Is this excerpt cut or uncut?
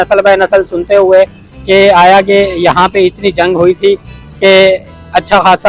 uncut